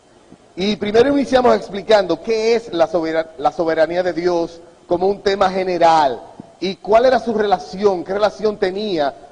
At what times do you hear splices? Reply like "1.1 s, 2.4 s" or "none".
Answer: 1.8 s